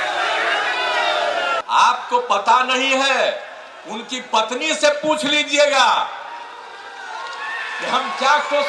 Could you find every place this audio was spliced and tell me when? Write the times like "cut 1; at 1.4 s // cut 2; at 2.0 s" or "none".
cut 1; at 1.6 s

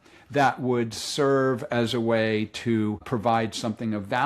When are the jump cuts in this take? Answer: cut 1; at 3.0 s

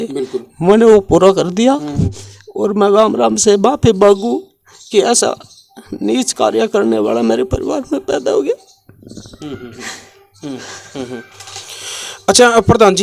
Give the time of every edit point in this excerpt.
none

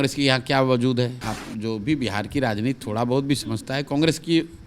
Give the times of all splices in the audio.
cut 1; at 1.2 s

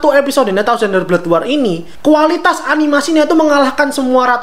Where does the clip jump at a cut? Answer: cut 1; at 1.9 s

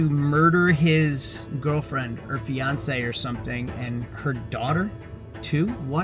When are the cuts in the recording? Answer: none

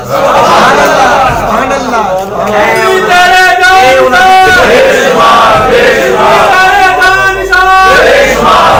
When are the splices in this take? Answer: none

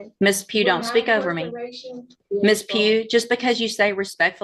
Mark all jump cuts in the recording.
cut 1; at 2.2 s

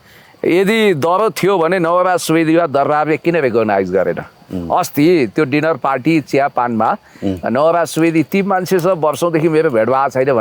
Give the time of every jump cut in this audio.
none

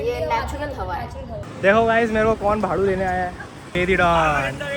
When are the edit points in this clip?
cut 1; at 1.5 s // cut 2; at 3.6 s

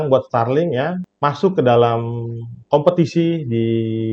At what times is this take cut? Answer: cut 1; at 1.1 s

